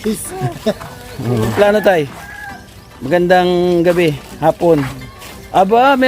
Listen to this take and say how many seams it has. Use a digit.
1